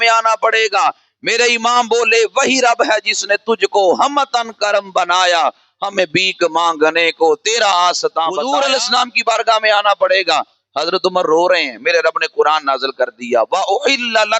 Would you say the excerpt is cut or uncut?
cut